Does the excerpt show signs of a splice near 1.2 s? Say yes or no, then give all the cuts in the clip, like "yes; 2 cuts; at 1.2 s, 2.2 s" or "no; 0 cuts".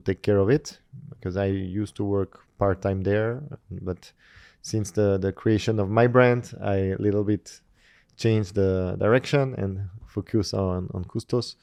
no; 0 cuts